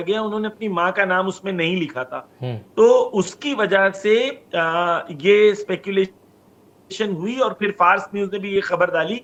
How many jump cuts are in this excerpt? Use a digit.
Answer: 0